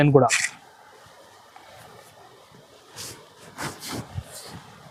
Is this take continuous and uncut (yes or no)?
yes